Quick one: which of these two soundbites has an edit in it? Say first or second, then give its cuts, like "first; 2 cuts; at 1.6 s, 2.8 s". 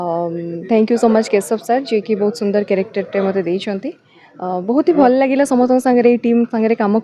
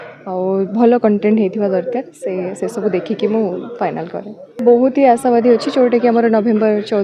second; 1 cut; at 4.5 s